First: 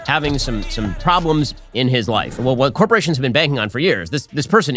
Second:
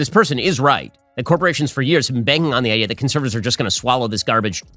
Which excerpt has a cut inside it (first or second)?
first